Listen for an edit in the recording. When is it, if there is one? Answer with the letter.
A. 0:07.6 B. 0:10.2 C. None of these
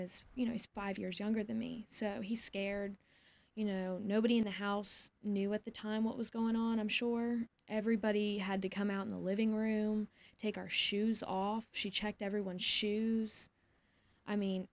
A